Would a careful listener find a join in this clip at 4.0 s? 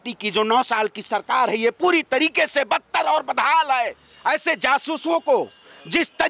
yes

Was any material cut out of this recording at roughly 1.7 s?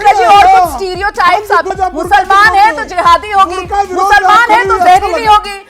yes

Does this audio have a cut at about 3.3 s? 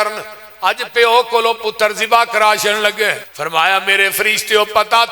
yes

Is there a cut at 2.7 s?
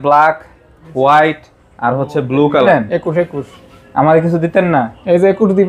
yes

